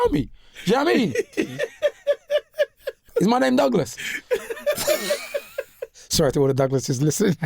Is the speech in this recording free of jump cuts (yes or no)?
no